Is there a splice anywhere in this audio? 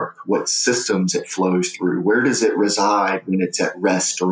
no; 0 cuts

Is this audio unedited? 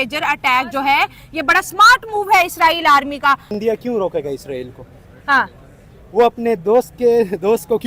no; 1 cut; at 3.5 s

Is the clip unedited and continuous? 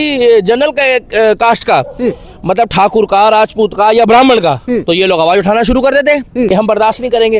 yes; 0 cuts

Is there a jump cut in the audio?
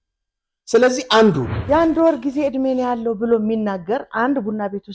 yes; 1 cut; at 1.6 s

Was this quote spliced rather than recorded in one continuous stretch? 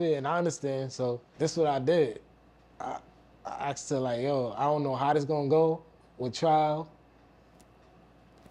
yes; 1 cut; at 1.3 s

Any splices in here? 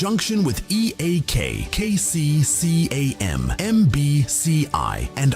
yes; 1 cut; at 1.8 s

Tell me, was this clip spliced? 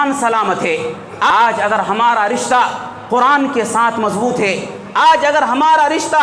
yes; 1 cut; at 1.3 s

